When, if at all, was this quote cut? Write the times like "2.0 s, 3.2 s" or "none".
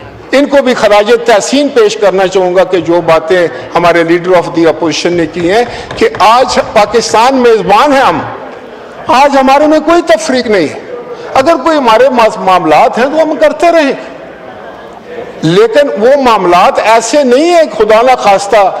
none